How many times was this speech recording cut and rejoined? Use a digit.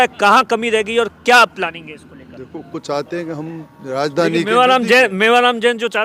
1